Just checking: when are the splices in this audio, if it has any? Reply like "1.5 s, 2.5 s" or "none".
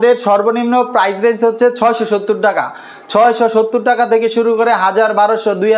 none